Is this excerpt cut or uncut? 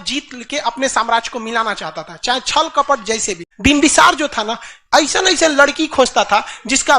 cut